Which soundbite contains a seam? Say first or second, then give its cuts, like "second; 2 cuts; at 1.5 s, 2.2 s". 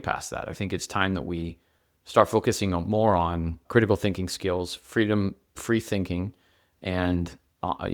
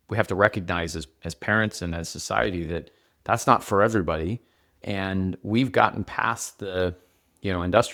first; 1 cut; at 3.6 s